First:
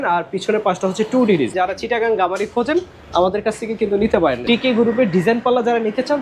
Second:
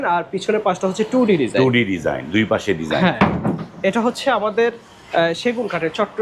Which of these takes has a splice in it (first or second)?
first